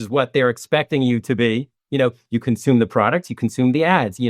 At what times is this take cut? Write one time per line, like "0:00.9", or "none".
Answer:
none